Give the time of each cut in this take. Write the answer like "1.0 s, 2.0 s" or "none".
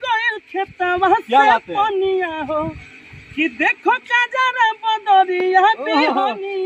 none